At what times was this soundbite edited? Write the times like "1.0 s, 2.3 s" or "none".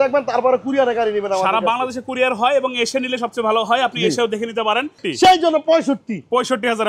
5.0 s